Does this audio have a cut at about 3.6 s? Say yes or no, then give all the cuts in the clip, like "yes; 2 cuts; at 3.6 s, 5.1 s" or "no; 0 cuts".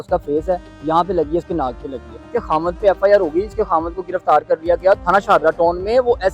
no; 2 cuts; at 2.3 s, 5.0 s